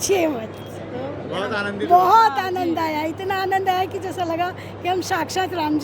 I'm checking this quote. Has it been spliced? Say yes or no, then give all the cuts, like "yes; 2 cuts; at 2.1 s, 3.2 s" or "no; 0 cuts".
no; 0 cuts